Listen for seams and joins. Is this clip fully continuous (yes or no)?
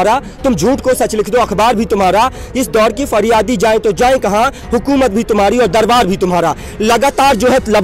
yes